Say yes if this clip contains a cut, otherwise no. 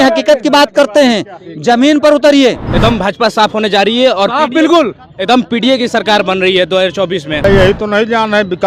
yes